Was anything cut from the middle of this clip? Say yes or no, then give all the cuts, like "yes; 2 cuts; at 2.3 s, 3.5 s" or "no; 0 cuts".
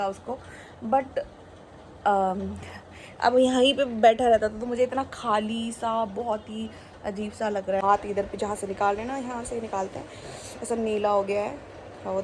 yes; 1 cut; at 7.8 s